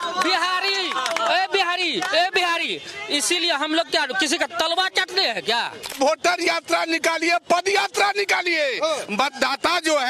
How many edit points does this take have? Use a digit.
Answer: 1